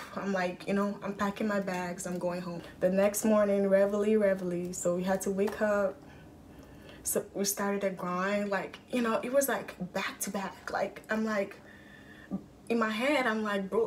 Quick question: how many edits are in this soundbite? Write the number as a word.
one